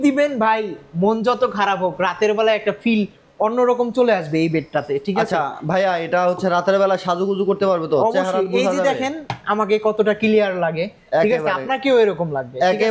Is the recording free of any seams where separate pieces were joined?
yes; 0 cuts

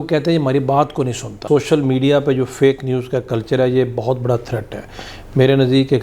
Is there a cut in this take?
yes; 1 cut; at 1.4 s

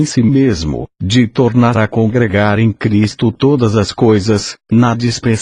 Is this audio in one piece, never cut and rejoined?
no; 1 cut; at 2.6 s

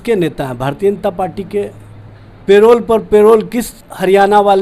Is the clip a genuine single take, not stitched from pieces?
yes; 0 cuts

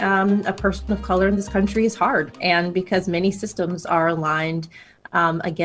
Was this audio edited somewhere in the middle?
no; 0 cuts

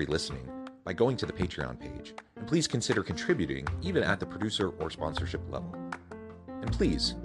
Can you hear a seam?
no; 0 cuts

